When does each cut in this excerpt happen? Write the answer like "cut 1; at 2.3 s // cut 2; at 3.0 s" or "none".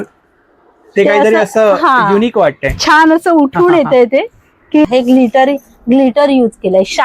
cut 1; at 4.9 s